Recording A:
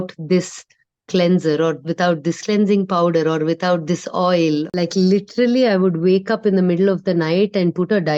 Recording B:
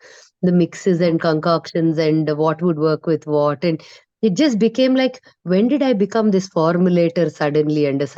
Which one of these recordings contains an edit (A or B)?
A